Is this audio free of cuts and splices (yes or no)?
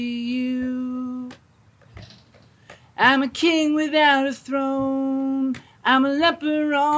yes